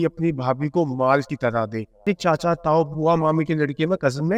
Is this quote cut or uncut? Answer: cut